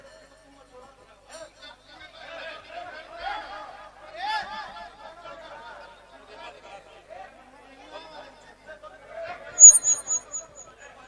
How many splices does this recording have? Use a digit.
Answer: 0